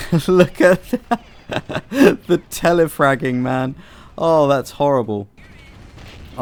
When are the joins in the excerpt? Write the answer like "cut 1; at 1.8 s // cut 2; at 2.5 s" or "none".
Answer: none